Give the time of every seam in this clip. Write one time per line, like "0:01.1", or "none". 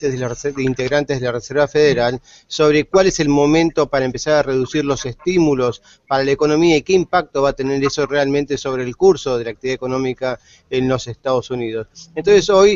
none

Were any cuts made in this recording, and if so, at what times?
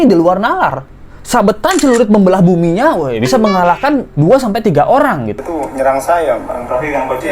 0:05.4

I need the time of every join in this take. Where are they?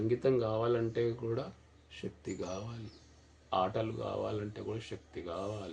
none

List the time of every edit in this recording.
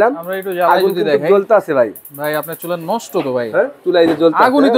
0:03.8

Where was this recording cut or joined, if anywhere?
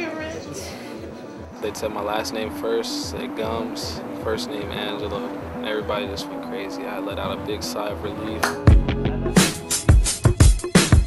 0:03.6

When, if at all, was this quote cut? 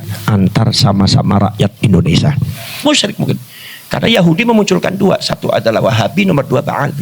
0:02.8

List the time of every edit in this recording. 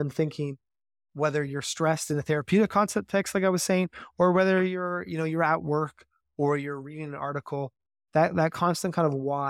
none

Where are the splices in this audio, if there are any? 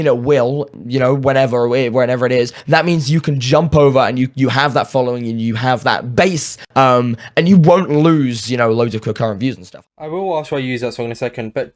0:09.7

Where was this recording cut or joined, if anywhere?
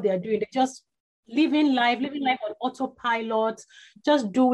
0:01.2

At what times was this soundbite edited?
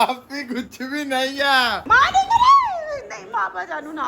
0:01.8

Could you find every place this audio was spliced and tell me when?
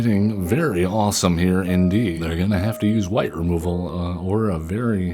0:02.2

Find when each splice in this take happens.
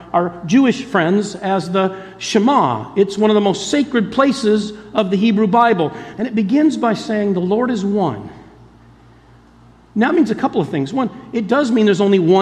0:06.0

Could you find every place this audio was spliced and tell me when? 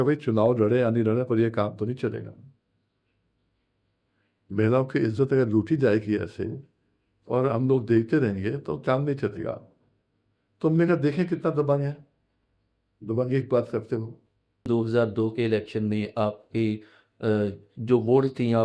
0:14.7

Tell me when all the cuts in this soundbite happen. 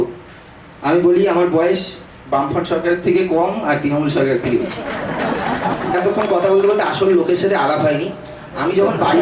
0:06.0

